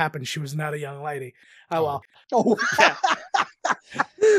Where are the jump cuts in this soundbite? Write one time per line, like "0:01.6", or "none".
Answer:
0:01.8

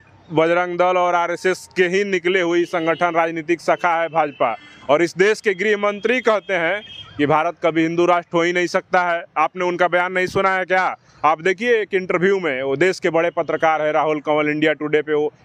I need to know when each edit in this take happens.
none

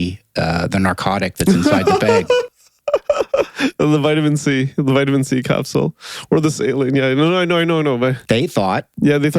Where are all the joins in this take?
none

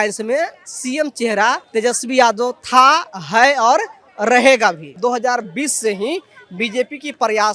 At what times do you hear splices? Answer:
0:01.6
0:04.9

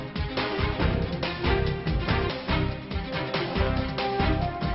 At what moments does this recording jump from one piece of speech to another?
0:01.2

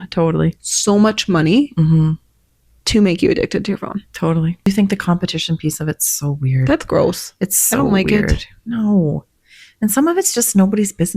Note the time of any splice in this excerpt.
0:04.7

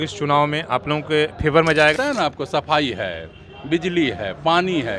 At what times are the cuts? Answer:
0:02.0

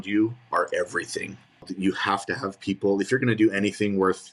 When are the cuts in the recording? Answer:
0:01.7

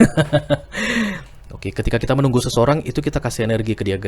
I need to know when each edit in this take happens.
0:01.4

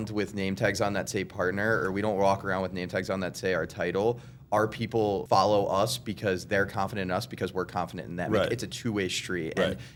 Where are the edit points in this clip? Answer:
none

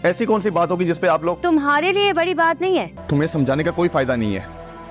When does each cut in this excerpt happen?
0:03.0

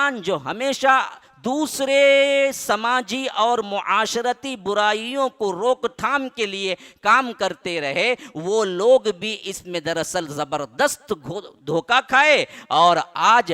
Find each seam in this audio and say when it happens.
none

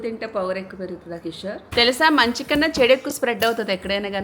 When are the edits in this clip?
0:01.7

